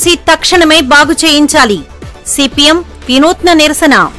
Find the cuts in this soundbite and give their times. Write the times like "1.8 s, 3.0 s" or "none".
none